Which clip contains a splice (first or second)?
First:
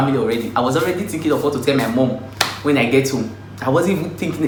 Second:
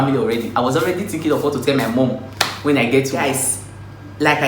second